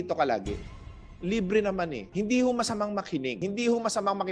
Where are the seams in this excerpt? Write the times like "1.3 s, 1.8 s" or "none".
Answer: 0.8 s, 2.1 s, 3.4 s